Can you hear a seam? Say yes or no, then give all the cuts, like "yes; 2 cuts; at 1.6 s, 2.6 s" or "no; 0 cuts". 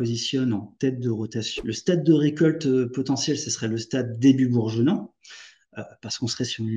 yes; 1 cut; at 1.4 s